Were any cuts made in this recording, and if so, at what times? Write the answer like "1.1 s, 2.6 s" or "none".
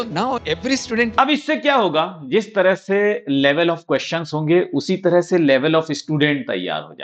none